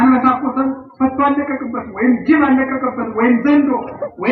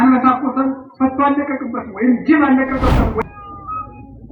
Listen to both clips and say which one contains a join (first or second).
second